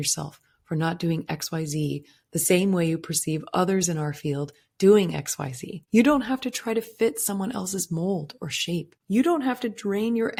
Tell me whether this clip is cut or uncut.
uncut